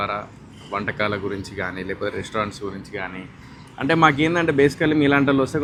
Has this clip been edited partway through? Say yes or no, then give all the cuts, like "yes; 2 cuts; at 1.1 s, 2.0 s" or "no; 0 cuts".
no; 0 cuts